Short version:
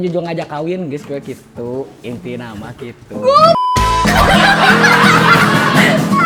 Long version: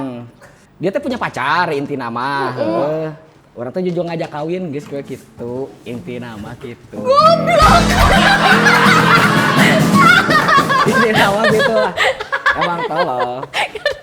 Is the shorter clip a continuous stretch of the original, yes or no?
yes